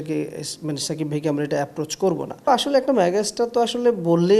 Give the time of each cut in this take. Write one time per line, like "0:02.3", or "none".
0:02.5